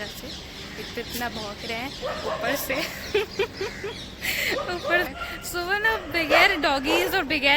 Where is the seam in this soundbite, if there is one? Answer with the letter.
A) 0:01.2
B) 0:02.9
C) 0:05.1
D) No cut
C